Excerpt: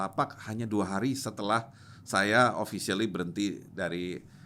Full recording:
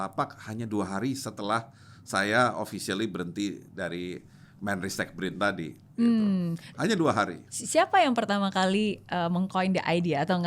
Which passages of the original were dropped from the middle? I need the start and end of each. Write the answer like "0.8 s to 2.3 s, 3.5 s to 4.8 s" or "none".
none